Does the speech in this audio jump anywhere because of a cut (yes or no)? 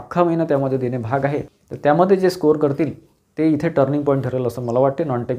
yes